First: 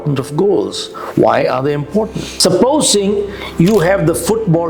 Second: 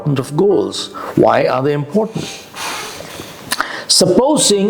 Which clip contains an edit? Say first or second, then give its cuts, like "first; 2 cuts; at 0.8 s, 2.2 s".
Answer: first; 1 cut; at 2.2 s